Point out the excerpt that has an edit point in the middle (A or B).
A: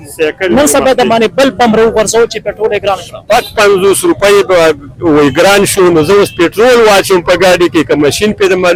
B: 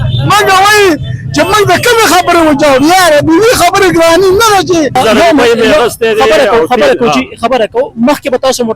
B